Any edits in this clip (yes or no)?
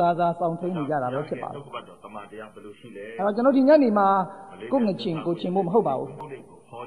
no